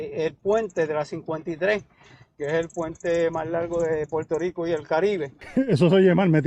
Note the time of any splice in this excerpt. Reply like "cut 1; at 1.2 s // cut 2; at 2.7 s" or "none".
cut 1; at 5.4 s

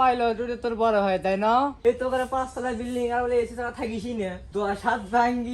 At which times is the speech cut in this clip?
cut 1; at 1.8 s // cut 2; at 4.4 s

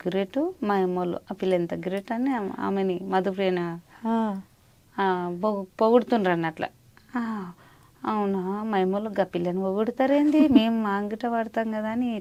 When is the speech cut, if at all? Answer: none

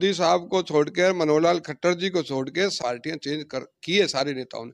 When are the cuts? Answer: cut 1; at 2.8 s

